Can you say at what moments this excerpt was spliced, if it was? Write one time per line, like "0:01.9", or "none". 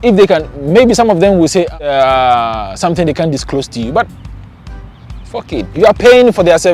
0:01.9